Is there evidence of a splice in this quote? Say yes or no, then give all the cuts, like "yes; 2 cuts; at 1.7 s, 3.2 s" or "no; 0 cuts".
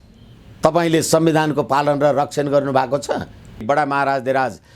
yes; 1 cut; at 3.6 s